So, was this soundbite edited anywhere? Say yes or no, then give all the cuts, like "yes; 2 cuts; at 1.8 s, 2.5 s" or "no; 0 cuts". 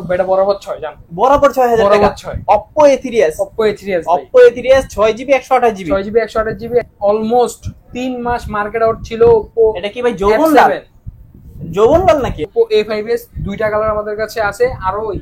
yes; 2 cuts; at 6.9 s, 12.5 s